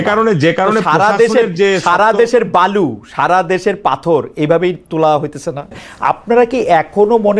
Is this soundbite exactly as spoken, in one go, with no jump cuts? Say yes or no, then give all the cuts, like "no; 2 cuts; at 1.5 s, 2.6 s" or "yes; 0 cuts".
no; 1 cut; at 5.9 s